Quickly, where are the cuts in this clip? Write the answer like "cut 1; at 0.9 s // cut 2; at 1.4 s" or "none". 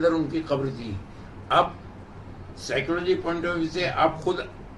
none